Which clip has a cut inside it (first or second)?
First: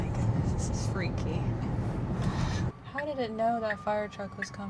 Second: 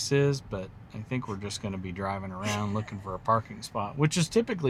first